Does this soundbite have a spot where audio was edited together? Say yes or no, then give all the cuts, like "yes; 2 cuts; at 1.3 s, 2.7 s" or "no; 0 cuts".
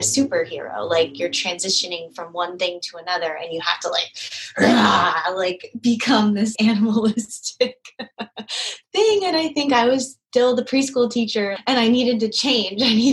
yes; 2 cuts; at 6.5 s, 11.5 s